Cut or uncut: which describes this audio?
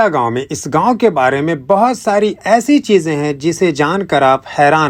uncut